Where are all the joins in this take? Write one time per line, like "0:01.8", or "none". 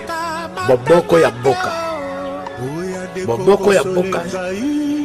none

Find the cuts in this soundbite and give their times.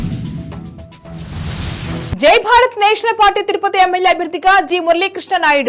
0:02.0

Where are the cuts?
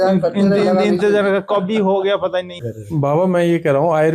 0:02.7

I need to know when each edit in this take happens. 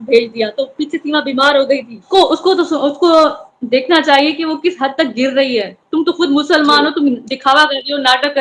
0:02.1

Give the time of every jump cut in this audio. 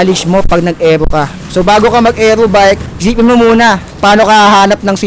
0:01.4
0:02.9
0:03.9

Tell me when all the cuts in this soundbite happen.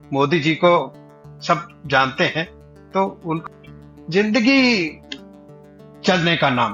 0:03.4

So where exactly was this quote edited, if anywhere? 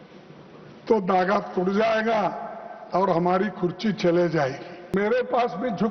0:04.9

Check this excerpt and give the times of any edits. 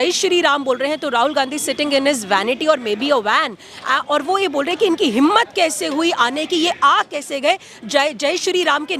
none

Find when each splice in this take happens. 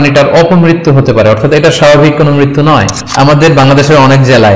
0:03.0

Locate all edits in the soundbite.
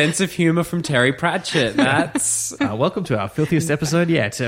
0:02.5

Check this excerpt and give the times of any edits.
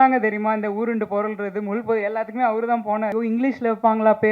0:03.1

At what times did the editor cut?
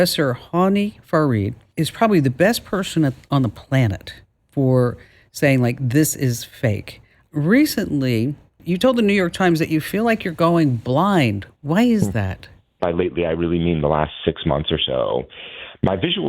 0:01.6
0:07.2
0:08.6
0:12.8

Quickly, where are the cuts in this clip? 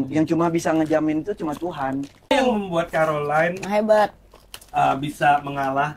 0:02.3

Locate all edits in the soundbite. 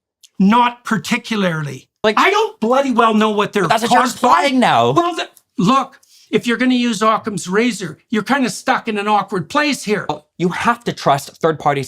0:02.0
0:10.3

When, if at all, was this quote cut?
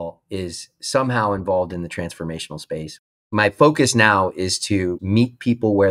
0:03.2
0:05.0

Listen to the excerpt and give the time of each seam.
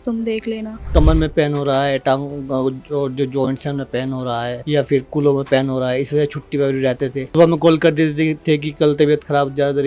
0:00.9
0:04.6
0:07.2

